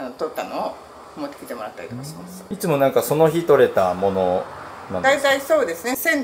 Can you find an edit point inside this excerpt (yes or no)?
no